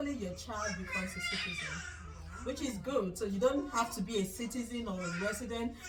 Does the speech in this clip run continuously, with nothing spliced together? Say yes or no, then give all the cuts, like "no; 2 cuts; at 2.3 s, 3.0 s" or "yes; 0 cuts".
yes; 0 cuts